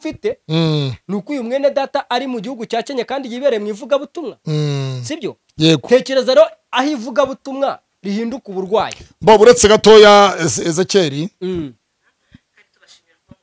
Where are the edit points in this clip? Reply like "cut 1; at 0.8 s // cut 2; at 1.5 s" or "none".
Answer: none